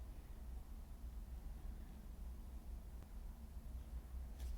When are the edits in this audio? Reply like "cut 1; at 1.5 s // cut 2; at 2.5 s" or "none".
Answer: cut 1; at 3.0 s

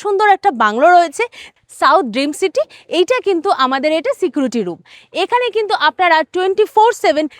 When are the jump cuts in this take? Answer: cut 1; at 1.5 s

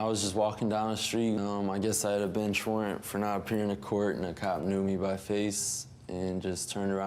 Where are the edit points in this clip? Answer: cut 1; at 1.4 s

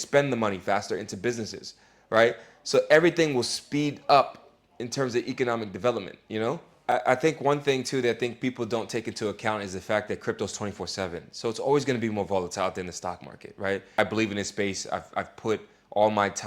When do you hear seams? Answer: cut 1; at 6.7 s // cut 2; at 14.0 s

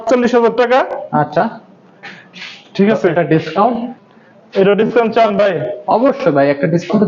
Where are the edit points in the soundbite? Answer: none

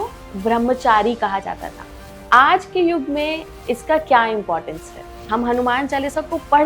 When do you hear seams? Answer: cut 1; at 5.2 s

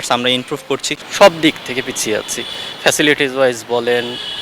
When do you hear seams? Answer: cut 1; at 1.0 s

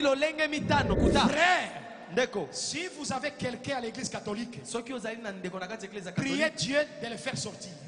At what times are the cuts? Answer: cut 1; at 1.0 s

